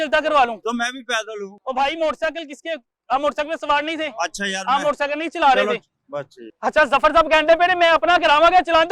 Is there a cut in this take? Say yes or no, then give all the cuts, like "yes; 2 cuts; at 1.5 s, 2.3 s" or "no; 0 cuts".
no; 0 cuts